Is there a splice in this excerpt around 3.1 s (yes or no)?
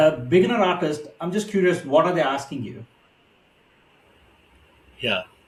no